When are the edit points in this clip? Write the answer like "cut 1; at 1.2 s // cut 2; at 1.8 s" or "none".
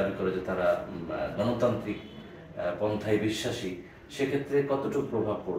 none